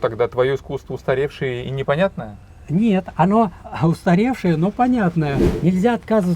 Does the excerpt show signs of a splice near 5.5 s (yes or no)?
yes